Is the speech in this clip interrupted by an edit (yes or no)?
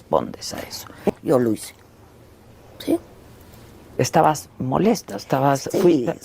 yes